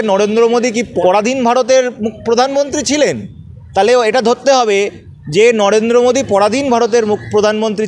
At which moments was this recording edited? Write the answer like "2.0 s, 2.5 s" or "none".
0.9 s